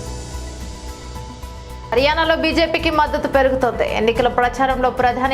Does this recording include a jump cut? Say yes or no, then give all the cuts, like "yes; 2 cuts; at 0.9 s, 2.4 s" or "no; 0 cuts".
yes; 1 cut; at 1.6 s